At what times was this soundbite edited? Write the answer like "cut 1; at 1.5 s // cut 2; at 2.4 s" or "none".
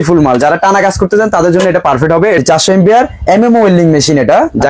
cut 1; at 2.4 s